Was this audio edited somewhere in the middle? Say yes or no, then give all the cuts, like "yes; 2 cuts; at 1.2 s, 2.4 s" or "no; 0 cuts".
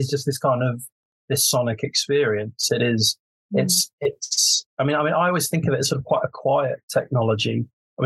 no; 0 cuts